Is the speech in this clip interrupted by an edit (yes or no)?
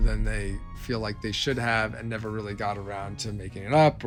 no